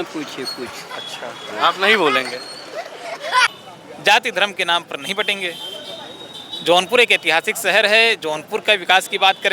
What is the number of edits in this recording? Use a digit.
1